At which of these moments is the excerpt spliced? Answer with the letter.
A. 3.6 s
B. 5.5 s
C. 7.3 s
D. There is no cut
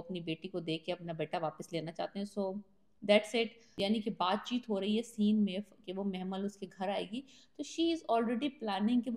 A